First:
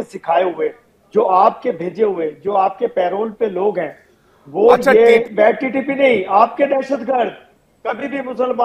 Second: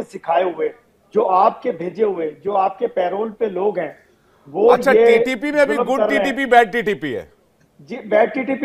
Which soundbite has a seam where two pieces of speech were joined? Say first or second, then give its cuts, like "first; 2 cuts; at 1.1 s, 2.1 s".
first; 1 cut; at 5.3 s